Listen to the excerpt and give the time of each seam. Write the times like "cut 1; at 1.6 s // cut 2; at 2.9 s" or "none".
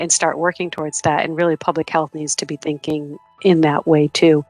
none

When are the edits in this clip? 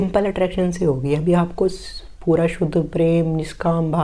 none

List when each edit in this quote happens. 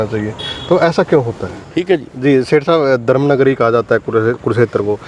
cut 1; at 1.6 s

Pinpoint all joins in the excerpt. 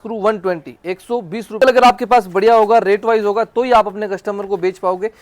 cut 1; at 1.6 s

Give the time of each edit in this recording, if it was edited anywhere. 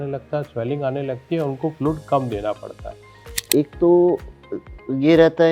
cut 1; at 3.3 s

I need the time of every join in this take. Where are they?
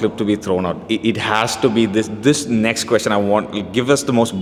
none

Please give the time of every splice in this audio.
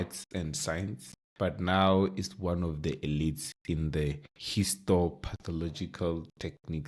none

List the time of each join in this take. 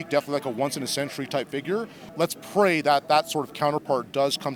cut 1; at 2.0 s

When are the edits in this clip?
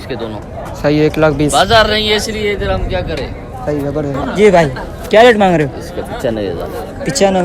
cut 1; at 4.2 s

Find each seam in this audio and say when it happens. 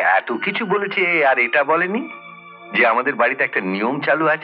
none

